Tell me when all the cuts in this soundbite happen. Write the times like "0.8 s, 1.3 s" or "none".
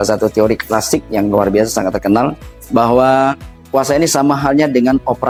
none